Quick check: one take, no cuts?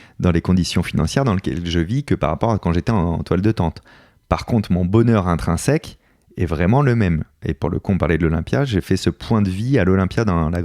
yes; 0 cuts

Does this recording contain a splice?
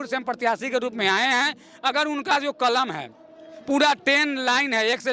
no; 0 cuts

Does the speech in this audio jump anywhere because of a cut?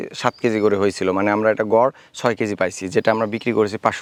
no; 0 cuts

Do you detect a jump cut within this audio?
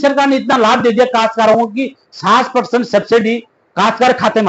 no; 0 cuts

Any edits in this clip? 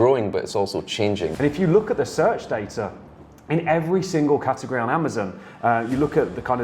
yes; 1 cut; at 1.3 s

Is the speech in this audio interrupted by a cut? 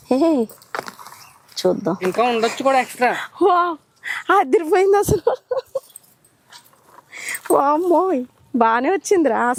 no; 0 cuts

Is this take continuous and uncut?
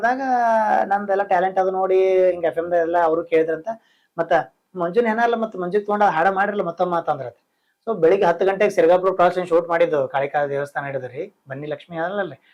yes; 0 cuts

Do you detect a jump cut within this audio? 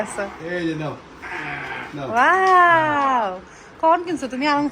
no; 0 cuts

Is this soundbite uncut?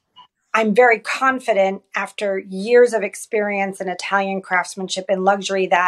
yes; 0 cuts

